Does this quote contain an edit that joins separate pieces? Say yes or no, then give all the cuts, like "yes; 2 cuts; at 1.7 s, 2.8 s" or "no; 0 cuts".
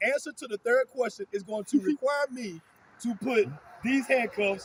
no; 0 cuts